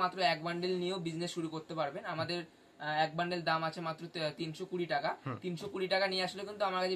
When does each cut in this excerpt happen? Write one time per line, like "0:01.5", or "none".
none